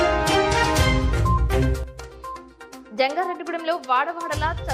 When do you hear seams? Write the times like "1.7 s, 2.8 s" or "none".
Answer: 2.4 s